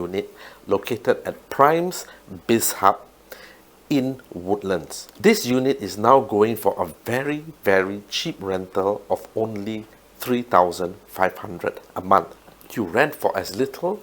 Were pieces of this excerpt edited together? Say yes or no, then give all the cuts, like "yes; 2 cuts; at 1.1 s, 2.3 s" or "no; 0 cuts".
yes; 1 cut; at 12.4 s